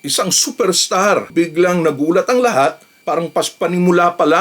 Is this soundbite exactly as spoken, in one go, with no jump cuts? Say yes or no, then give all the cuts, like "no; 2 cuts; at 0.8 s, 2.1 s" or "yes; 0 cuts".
no; 1 cut; at 1.3 s